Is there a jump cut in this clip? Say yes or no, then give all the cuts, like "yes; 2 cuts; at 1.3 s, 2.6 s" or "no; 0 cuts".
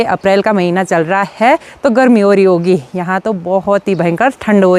no; 0 cuts